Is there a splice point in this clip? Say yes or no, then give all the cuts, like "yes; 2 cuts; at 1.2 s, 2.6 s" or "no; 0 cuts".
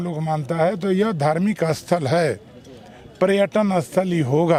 no; 0 cuts